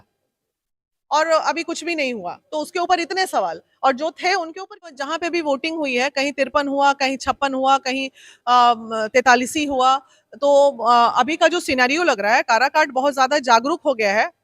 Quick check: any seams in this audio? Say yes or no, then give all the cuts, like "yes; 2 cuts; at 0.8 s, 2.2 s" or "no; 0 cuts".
yes; 1 cut; at 5.0 s